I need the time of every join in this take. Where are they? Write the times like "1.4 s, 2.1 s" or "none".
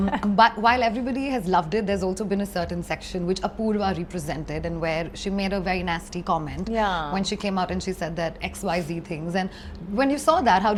none

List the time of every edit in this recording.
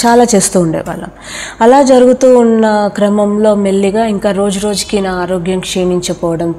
none

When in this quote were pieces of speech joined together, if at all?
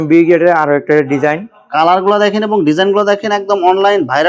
none

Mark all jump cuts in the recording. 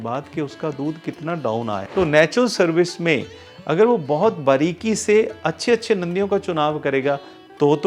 1.8 s

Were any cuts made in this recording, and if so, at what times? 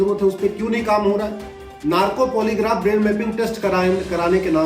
1.7 s

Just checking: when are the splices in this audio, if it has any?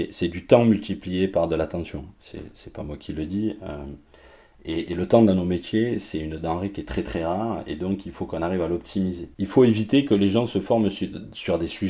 9.3 s

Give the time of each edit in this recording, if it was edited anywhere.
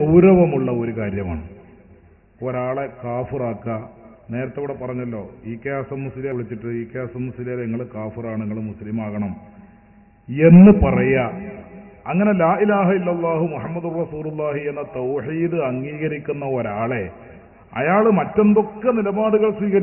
6.3 s

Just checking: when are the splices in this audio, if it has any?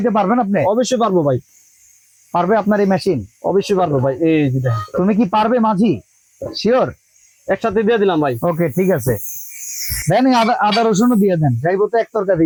none

